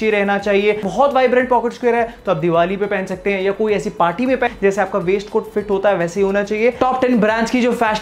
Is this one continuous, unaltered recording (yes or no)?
no